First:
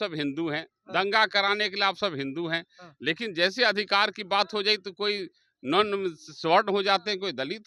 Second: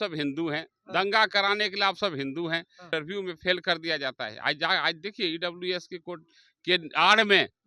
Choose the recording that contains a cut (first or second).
second